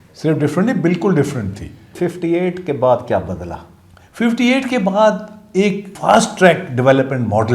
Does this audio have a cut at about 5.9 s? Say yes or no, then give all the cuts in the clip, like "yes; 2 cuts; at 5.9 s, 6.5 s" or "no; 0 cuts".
yes; 2 cuts; at 1.9 s, 5.9 s